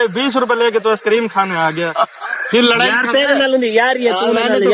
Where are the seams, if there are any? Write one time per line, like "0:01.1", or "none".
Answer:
none